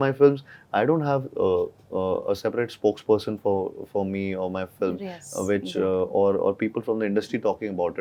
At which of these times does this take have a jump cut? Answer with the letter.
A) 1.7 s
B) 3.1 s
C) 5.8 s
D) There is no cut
D